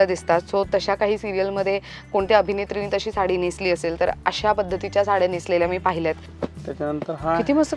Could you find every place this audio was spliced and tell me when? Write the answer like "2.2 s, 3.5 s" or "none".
6.3 s